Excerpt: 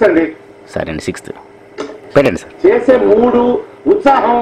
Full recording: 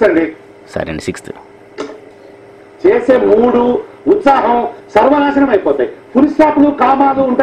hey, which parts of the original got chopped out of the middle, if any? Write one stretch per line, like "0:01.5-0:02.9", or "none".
0:02.1-0:02.3